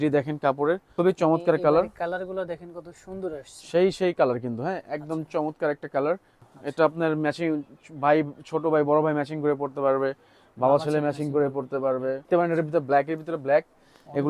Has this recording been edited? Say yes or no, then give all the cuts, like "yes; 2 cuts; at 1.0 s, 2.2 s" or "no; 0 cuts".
yes; 3 cuts; at 0.9 s, 6.4 s, 12.3 s